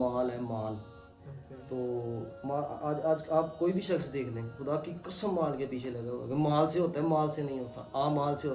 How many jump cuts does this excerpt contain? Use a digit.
0